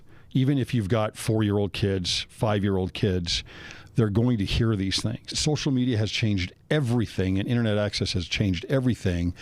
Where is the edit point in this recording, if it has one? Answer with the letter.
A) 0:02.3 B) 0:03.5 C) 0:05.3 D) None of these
C